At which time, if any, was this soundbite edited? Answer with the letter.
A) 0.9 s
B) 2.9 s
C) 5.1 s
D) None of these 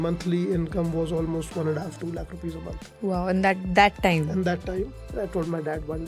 C